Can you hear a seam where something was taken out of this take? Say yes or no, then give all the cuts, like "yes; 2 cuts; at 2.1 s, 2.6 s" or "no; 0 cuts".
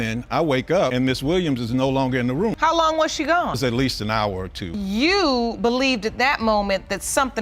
no; 0 cuts